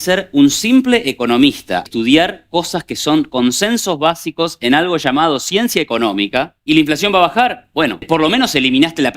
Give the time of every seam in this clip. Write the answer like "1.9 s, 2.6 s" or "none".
1.9 s, 6.5 s, 8.0 s